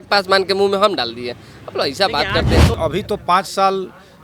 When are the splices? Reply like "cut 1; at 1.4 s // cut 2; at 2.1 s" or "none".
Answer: cut 1; at 2.7 s